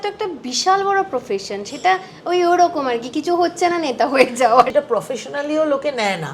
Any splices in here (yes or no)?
yes